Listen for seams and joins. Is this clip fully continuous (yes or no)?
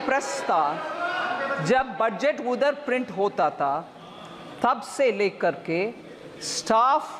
yes